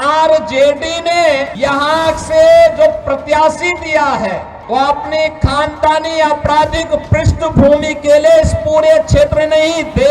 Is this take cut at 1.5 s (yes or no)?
yes